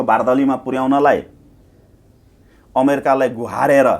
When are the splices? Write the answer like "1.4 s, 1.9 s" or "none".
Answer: none